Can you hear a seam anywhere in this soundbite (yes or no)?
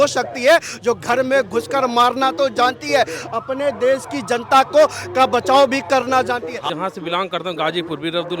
yes